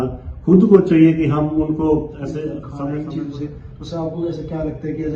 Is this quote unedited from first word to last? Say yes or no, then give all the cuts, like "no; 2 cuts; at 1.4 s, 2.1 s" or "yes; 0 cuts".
no; 1 cut; at 2.7 s